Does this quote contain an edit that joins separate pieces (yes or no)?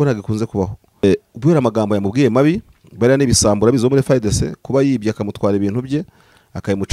yes